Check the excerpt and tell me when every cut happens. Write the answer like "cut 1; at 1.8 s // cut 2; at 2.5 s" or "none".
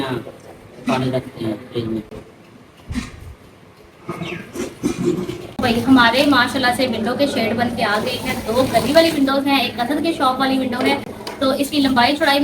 none